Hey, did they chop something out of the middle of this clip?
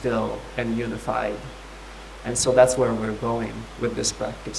no; 0 cuts

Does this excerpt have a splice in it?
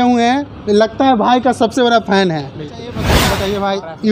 yes; 1 cut; at 3.2 s

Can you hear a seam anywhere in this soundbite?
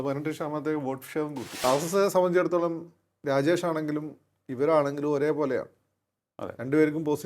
yes; 1 cut; at 1.5 s

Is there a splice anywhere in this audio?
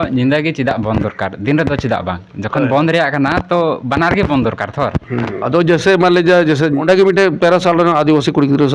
yes; 1 cut; at 6.8 s

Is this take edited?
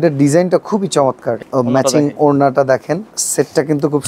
yes; 2 cuts; at 1.4 s, 3.1 s

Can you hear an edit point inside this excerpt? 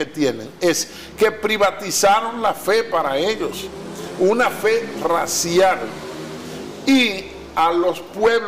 no; 0 cuts

